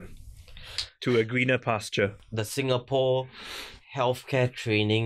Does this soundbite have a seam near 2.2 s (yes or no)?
yes